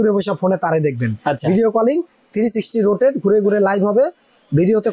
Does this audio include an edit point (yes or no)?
no